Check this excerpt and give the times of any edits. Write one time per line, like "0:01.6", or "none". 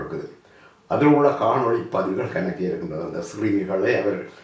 none

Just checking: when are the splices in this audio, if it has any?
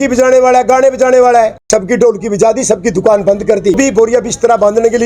0:01.6
0:03.8

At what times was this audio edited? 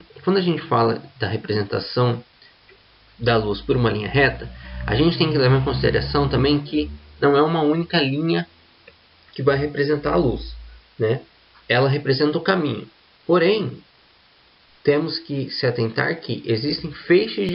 none

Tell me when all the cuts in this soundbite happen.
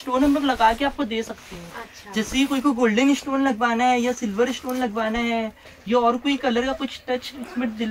none

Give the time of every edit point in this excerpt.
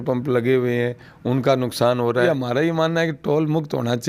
0:02.2

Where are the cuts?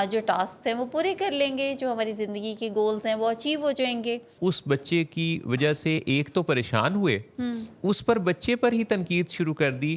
0:04.3

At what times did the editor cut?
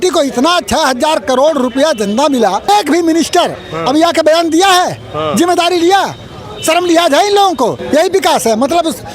0:02.7
0:07.8

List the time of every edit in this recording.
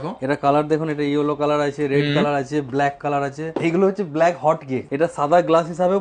0:03.5
0:04.9

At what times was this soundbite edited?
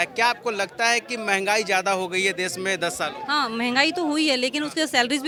none

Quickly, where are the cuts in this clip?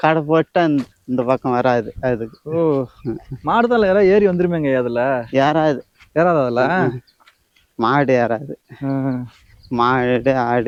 none

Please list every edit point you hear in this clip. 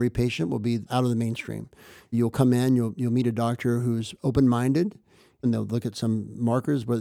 0:00.9
0:02.1
0:05.4

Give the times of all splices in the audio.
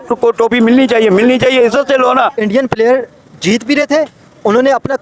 0:02.3

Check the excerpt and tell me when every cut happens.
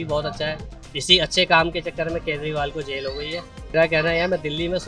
0:03.7

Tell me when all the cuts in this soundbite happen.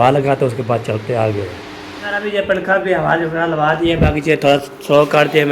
none

